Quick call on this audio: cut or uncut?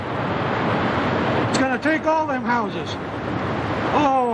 uncut